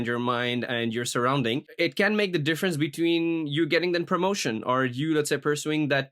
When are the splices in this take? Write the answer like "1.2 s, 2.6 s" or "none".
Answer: 1.7 s